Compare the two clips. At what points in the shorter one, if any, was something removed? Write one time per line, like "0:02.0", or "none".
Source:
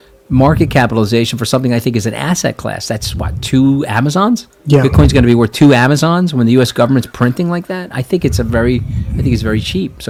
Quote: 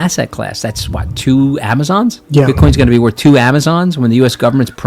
0:02.2